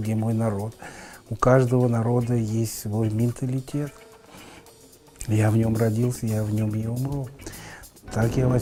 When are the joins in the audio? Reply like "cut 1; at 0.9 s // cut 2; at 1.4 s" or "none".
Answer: none

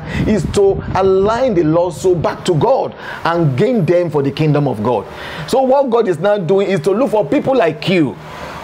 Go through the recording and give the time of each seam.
cut 1; at 5.3 s

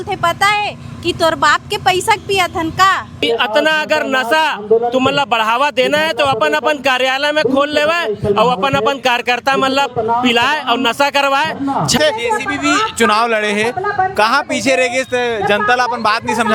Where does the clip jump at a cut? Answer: cut 1; at 3.3 s // cut 2; at 12.0 s

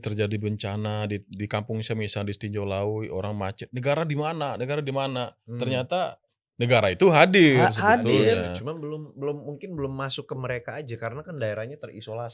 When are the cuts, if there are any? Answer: none

